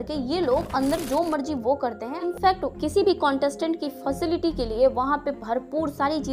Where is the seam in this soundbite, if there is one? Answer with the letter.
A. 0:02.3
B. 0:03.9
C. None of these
A